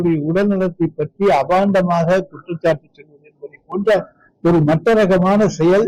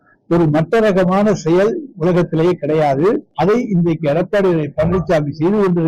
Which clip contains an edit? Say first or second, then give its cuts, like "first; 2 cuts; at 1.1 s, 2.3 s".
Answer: second; 1 cut; at 3.3 s